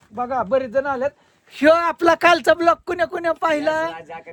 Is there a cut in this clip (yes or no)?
no